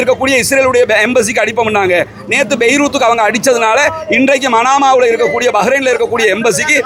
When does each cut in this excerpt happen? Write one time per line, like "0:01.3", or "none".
none